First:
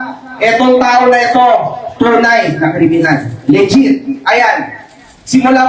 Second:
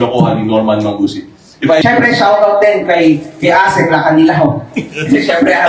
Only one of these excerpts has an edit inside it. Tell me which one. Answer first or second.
second